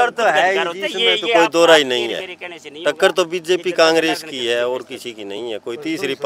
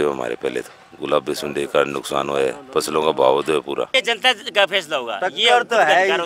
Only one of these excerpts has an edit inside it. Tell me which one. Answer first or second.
second